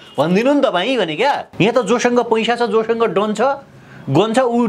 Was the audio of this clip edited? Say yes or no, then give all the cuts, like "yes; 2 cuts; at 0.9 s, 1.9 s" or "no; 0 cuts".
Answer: yes; 1 cut; at 1.5 s